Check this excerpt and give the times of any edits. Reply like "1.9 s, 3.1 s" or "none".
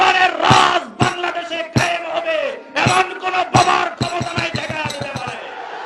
none

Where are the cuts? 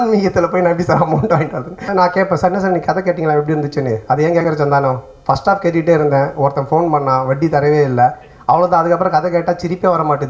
1.8 s

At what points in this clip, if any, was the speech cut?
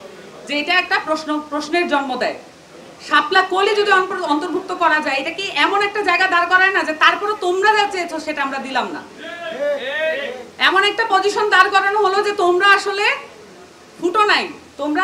none

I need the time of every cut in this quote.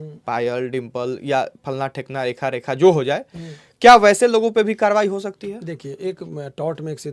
none

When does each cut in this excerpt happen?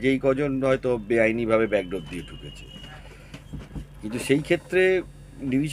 none

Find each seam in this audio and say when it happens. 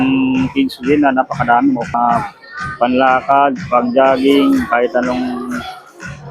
1.9 s

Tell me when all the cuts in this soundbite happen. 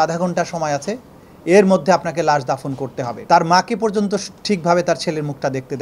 3.1 s

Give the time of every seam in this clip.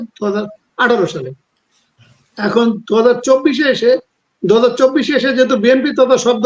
none

